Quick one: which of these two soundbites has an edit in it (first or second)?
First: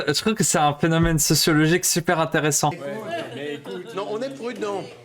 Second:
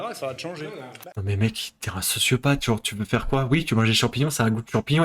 first